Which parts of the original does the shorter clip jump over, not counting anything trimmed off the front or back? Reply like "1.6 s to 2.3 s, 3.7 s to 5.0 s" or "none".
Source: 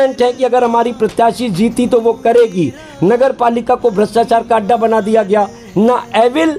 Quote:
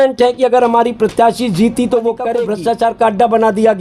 2.4 s to 3.9 s